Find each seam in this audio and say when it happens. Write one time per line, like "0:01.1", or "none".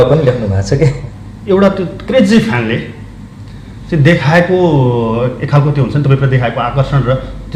0:01.0